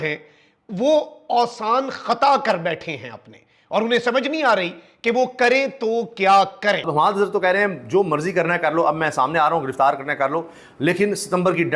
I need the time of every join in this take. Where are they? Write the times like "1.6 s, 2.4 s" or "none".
6.8 s